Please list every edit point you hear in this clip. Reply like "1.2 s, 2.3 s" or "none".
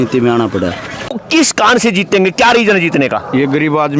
1.2 s